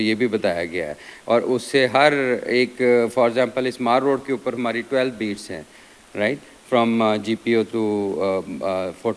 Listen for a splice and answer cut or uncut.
uncut